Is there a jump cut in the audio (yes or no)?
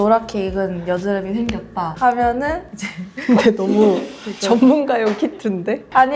no